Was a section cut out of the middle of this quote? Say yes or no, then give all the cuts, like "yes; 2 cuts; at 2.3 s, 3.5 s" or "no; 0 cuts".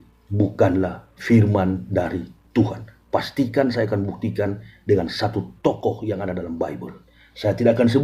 no; 0 cuts